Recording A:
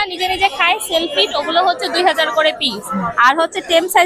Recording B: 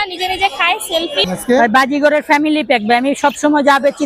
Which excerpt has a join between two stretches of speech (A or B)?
B